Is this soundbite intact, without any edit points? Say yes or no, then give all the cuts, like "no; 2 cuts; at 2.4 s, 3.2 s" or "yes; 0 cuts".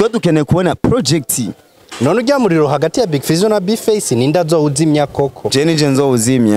yes; 0 cuts